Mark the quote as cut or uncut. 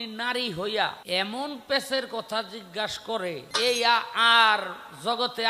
cut